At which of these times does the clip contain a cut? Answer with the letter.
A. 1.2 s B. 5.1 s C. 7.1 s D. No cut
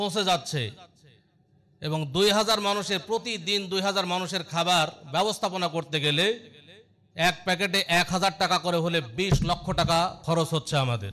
D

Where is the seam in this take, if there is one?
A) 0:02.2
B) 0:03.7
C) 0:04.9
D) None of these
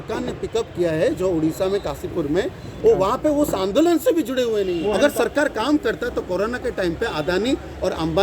C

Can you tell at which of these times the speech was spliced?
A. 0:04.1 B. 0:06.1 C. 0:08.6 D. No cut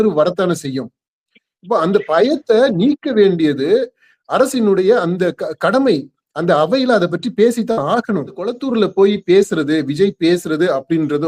C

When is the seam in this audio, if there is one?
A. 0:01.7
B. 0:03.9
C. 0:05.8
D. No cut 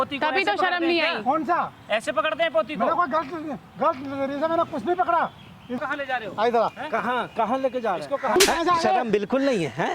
C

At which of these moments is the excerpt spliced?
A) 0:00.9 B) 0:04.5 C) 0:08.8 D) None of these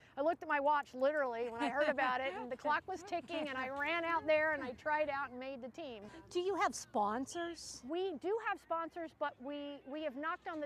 B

